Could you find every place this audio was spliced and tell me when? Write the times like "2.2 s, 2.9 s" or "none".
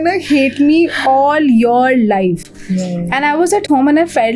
none